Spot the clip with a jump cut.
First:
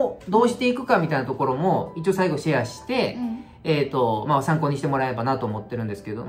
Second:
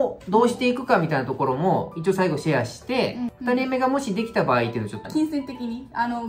second; 2 cuts; at 3.3 s, 5.1 s

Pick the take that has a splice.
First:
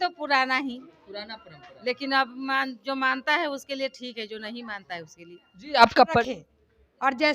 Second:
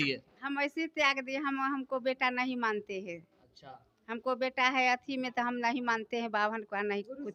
first; 1 cut; at 6.3 s

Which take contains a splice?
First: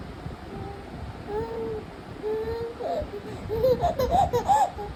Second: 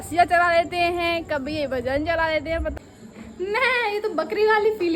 second; 1 cut; at 2.8 s

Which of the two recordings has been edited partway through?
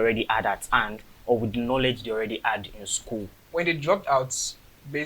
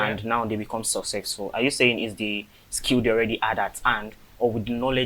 first; 1 cut; at 3.4 s

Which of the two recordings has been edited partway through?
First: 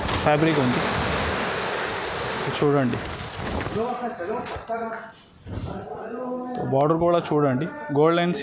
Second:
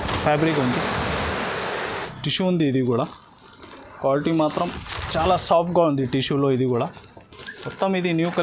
second; 1 cut; at 2.1 s

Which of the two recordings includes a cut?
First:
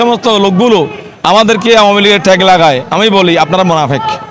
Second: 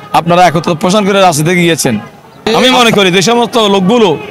second; 1 cut; at 2.4 s

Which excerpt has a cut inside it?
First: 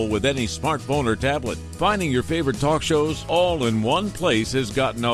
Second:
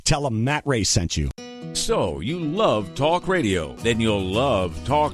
second; 1 cut; at 1.4 s

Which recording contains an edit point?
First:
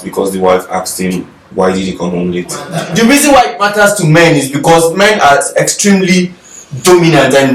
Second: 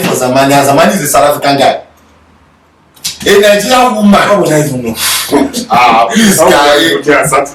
first; 1 cut; at 2.8 s

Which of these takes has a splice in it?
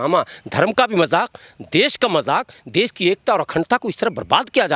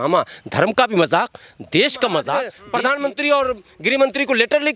second; 1 cut; at 2.6 s

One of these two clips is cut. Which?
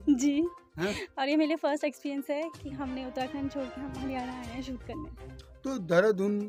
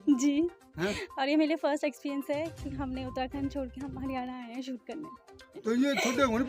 second; 1 cut; at 5.5 s

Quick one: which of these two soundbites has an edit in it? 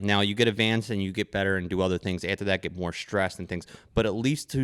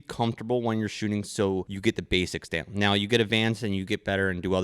second; 1 cut; at 1.7 s

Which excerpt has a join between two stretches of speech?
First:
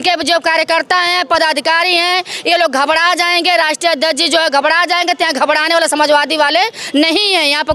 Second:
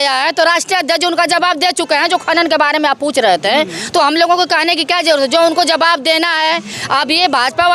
second; 1 cut; at 6.8 s

